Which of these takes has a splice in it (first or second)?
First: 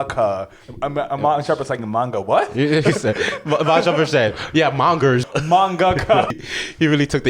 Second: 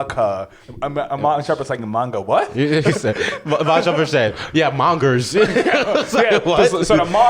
first